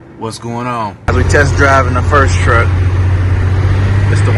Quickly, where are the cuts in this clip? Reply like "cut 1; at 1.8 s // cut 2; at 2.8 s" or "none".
cut 1; at 1.1 s